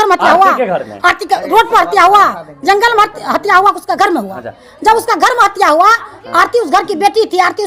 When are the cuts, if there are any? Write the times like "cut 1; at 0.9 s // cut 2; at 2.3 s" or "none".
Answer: none